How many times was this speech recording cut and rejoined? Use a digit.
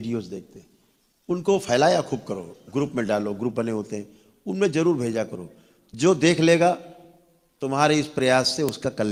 0